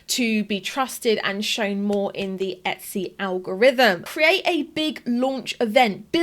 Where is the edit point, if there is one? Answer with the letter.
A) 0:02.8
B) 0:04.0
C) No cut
B